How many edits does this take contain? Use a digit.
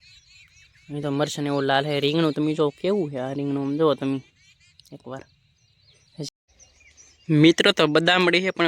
1